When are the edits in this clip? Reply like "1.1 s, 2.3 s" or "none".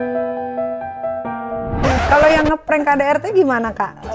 1.9 s